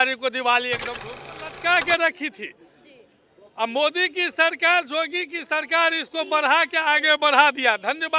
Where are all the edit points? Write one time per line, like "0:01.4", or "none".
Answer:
0:01.0

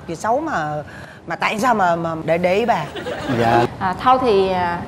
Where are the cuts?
0:03.7

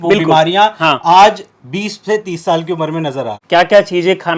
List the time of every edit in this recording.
0:02.3
0:03.4

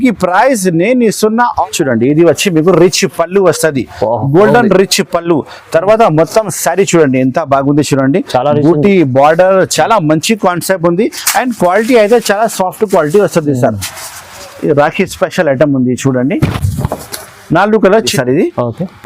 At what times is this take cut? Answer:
0:01.5
0:18.1

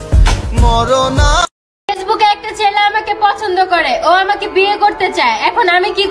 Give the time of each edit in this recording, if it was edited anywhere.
0:01.7

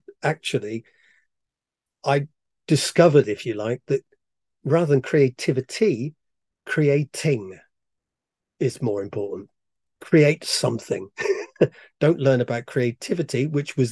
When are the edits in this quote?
none

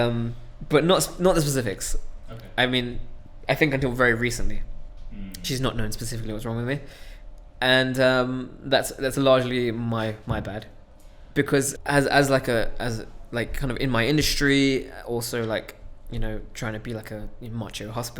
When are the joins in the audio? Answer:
0:11.7

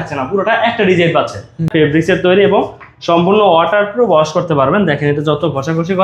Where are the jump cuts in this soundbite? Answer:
0:01.7

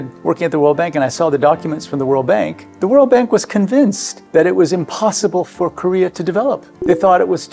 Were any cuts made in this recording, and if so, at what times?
none

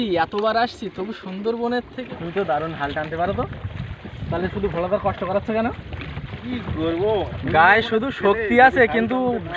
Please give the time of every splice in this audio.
0:02.0

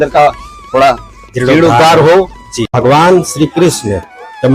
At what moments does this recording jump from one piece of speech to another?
0:02.7

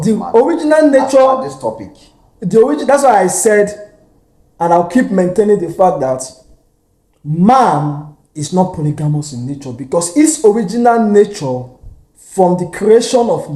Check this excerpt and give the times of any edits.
none

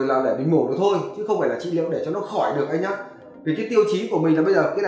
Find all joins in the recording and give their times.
none

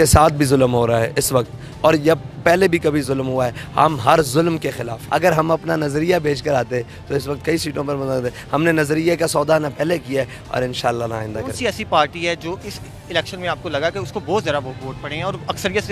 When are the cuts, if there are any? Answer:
0:05.0

